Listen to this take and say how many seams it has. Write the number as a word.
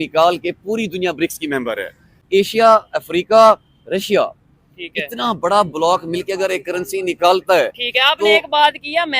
one